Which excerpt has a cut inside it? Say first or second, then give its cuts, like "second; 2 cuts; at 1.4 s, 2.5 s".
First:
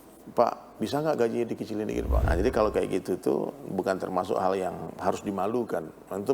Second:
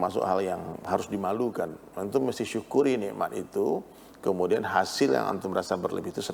first; 1 cut; at 2.2 s